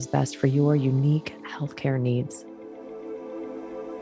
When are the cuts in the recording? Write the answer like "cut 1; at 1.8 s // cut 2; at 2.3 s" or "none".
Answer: cut 1; at 2.4 s

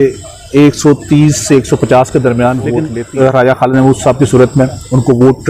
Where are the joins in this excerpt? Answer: cut 1; at 2.9 s

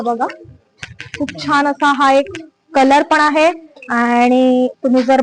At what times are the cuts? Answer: none

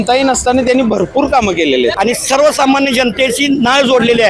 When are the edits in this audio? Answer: cut 1; at 1.9 s

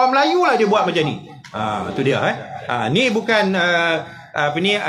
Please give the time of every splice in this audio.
none

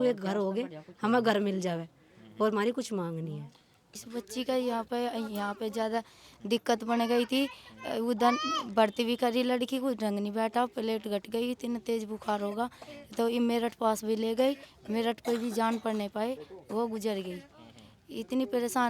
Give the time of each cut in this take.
cut 1; at 3.9 s

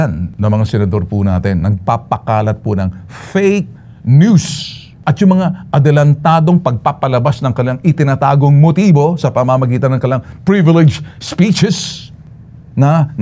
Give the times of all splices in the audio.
none

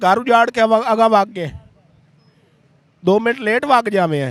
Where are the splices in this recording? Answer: none

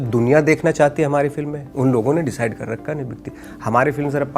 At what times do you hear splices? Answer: cut 1; at 1.6 s

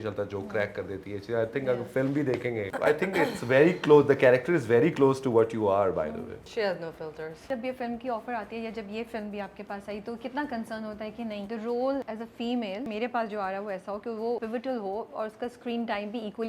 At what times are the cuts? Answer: cut 1; at 2.7 s // cut 2; at 6.5 s // cut 3; at 7.5 s // cut 4; at 11.5 s // cut 5; at 12.5 s // cut 6; at 14.4 s

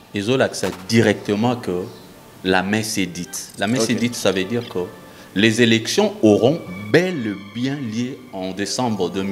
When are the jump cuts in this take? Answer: none

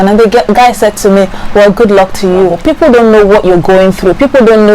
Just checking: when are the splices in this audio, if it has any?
cut 1; at 2.6 s

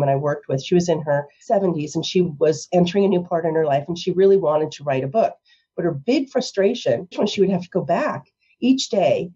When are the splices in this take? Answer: cut 1; at 1.3 s // cut 2; at 7.1 s

